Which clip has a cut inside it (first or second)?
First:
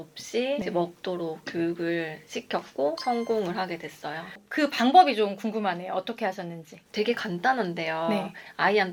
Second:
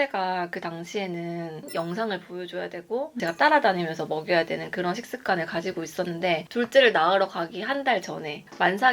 second